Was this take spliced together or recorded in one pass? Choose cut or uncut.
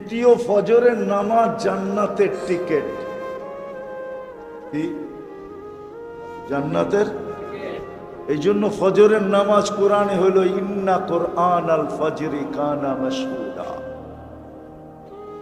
cut